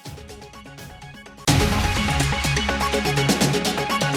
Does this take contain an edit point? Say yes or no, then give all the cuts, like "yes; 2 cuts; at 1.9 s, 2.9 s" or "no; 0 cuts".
no; 0 cuts